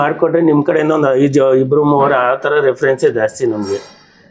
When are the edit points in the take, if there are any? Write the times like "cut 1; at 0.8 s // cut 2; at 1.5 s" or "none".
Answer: none